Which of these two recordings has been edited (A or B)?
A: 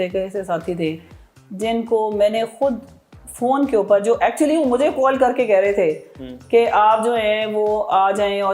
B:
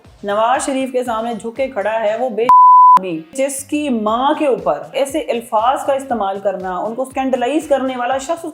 B